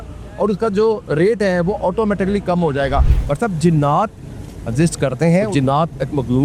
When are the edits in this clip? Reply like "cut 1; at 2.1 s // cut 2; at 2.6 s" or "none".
cut 1; at 3.2 s // cut 2; at 5.5 s